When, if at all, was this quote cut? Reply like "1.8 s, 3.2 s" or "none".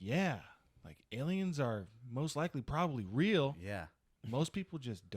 4.1 s